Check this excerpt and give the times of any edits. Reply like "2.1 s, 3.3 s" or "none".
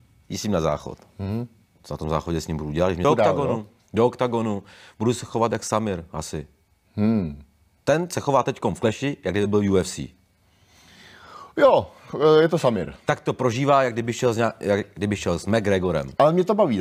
3.0 s